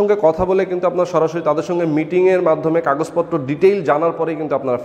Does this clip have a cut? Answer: no; 0 cuts

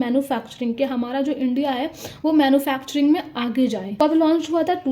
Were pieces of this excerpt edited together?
yes; 1 cut; at 3.9 s

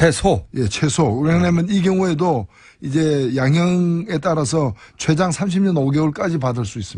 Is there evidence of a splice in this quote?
yes; 1 cut; at 4.8 s

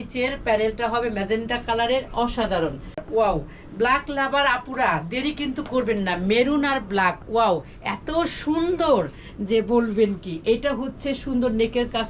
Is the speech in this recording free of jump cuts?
no; 1 cut; at 3.0 s

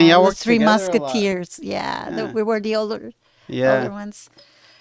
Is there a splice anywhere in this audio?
no; 0 cuts

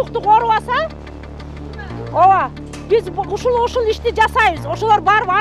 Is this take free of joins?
yes; 0 cuts

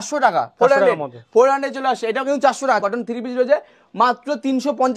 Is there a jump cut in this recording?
yes; 1 cut; at 2.8 s

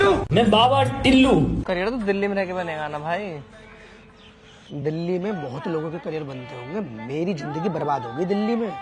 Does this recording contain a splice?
yes; 1 cut; at 1.6 s

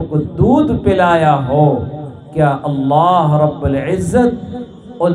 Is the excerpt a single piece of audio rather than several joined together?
yes; 0 cuts

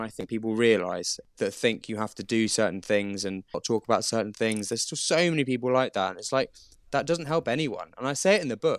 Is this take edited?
yes; 2 cuts; at 1.1 s, 3.6 s

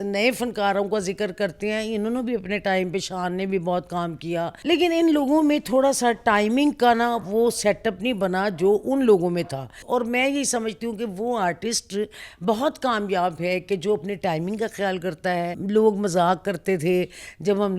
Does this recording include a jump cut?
yes; 3 cuts; at 4.5 s, 9.8 s, 15.5 s

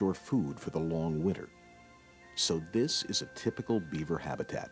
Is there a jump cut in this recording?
yes; 1 cut; at 1.7 s

